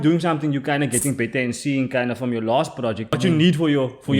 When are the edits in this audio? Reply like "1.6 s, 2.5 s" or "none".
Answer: 3.2 s